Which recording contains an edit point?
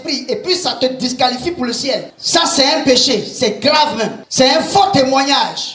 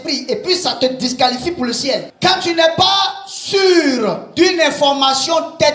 second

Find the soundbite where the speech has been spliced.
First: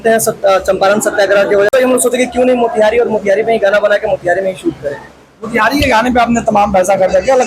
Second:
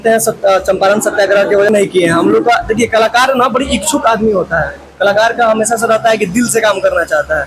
second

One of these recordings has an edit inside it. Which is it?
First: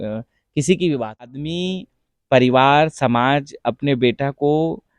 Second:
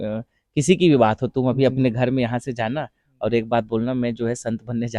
first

